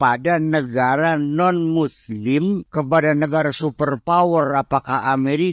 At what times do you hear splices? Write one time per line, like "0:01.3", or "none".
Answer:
0:02.7